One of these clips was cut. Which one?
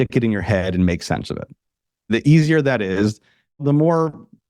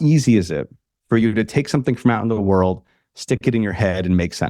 first; 2 cuts; at 2.1 s, 3.6 s

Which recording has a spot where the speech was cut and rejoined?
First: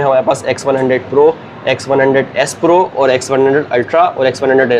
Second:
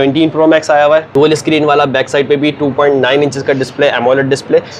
second; 1 cut; at 1.1 s

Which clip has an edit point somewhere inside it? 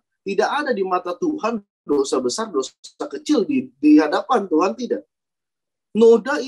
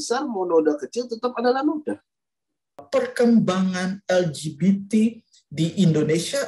second; 1 cut; at 2.8 s

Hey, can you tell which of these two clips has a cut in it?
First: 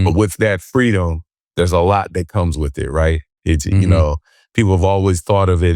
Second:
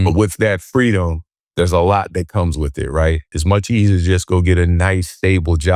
second; 1 cut; at 3.3 s

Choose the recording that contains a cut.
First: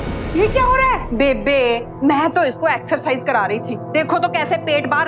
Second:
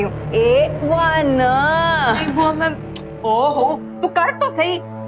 first; 1 cut; at 1.1 s

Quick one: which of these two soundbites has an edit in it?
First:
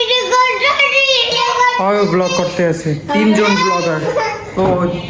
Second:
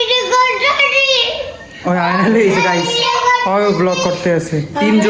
first; 1 cut; at 1.3 s

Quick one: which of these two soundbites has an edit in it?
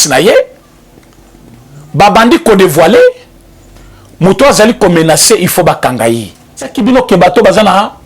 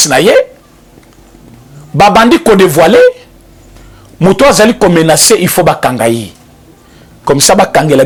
first; 1 cut; at 6.7 s

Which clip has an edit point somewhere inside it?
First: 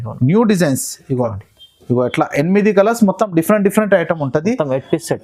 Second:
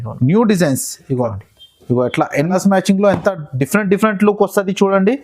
second; 1 cut; at 2.3 s

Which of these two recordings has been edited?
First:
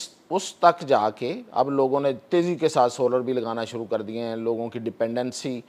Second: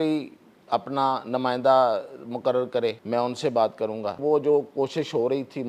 second; 2 cuts; at 3.0 s, 4.2 s

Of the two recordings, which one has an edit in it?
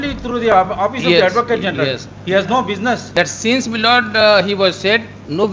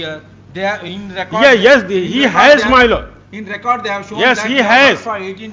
first; 1 cut; at 3.2 s

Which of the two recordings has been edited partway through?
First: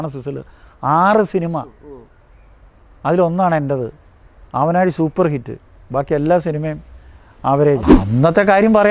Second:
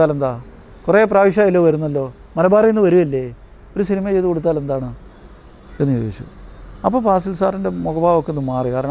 first; 1 cut; at 7.9 s

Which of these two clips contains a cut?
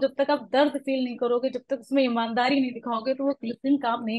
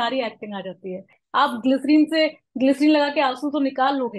second; 1 cut; at 1.1 s

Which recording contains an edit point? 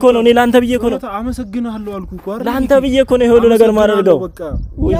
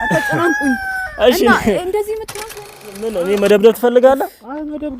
second; 1 cut; at 3.0 s

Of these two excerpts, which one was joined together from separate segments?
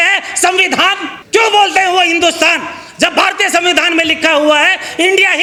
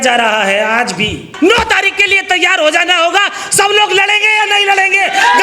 second; 1 cut; at 1.3 s

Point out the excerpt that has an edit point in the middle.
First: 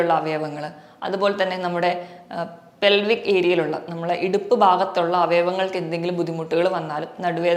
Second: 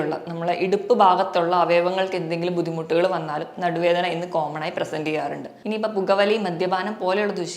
second; 1 cut; at 5.5 s

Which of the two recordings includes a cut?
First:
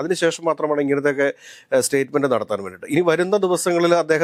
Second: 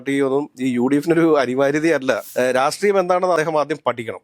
second; 1 cut; at 2.3 s

